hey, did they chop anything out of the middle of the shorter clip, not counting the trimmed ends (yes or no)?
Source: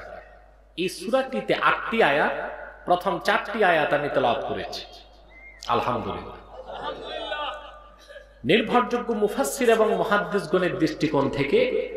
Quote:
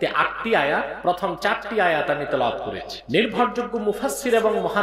yes